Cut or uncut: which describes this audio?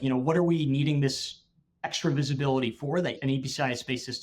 cut